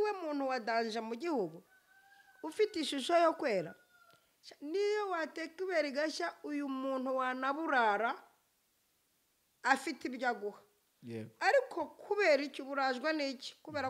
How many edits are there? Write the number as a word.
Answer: zero